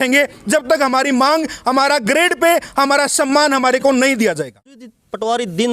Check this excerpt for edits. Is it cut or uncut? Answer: cut